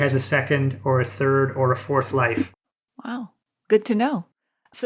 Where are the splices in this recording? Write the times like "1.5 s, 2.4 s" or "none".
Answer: none